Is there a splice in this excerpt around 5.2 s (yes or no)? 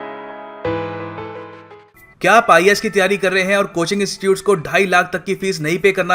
no